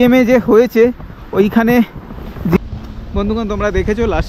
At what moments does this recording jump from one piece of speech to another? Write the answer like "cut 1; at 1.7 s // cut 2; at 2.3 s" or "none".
cut 1; at 2.6 s